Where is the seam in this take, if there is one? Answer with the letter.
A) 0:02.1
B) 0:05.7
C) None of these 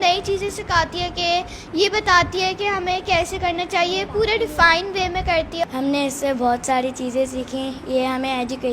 B